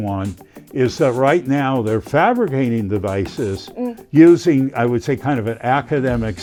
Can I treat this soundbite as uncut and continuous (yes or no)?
yes